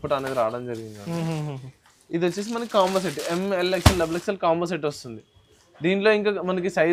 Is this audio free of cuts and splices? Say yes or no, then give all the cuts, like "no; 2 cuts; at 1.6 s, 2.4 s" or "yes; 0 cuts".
yes; 0 cuts